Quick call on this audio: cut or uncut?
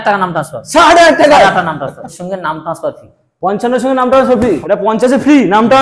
cut